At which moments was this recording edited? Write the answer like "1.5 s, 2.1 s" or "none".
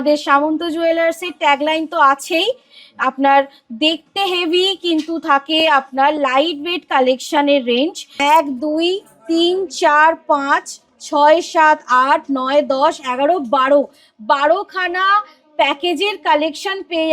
8.0 s